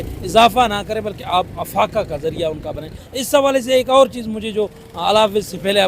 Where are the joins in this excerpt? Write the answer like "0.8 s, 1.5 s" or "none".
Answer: 3.0 s